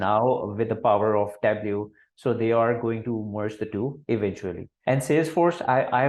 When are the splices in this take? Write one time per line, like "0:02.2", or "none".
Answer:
0:04.7